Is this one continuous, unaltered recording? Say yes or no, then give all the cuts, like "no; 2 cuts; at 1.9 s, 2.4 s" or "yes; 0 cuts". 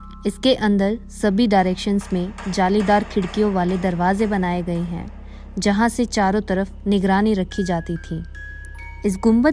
yes; 0 cuts